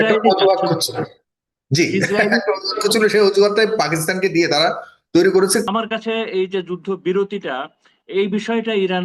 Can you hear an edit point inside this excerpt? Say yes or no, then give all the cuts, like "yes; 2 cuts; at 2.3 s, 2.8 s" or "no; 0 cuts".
yes; 1 cut; at 5.6 s